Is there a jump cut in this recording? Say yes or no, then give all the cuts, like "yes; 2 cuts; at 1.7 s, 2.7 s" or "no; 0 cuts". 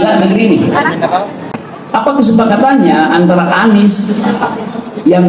yes; 1 cut; at 1.5 s